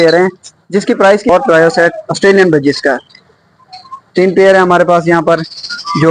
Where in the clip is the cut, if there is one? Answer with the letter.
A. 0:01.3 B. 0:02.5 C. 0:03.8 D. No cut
A